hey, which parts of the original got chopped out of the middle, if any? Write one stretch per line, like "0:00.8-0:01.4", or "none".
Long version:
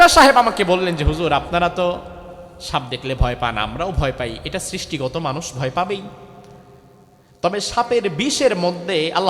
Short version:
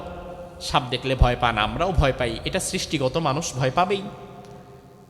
none

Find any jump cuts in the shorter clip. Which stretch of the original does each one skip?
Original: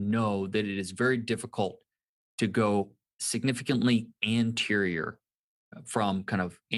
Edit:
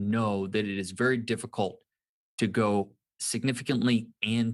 none

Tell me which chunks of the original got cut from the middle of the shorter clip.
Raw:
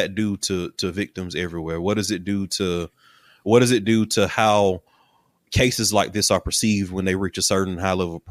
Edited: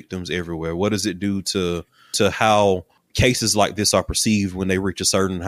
0:03.2-0:04.1
0:05.0-0:05.4

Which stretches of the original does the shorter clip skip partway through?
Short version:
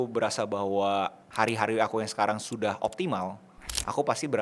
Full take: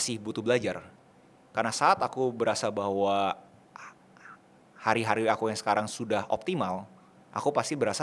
0:03.5-0:04.7

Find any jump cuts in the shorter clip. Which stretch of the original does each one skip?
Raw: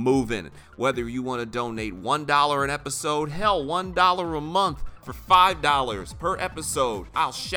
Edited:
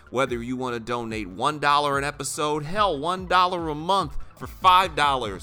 none

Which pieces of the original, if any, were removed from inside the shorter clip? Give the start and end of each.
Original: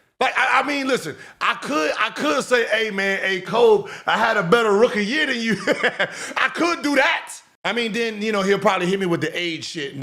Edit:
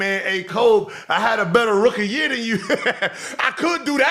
none

